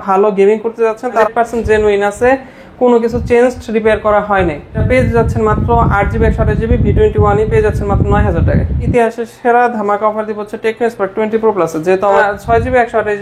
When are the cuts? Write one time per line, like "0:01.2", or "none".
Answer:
0:01.3
0:04.8
0:08.9
0:12.2

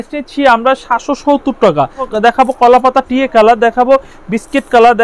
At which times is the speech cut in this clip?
0:02.1

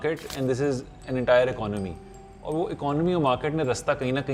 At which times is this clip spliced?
none

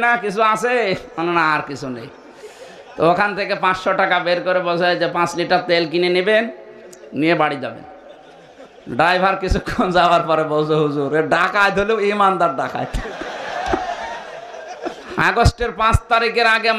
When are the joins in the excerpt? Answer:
0:15.0

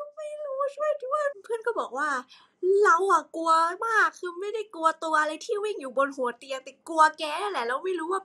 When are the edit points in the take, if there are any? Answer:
0:01.3

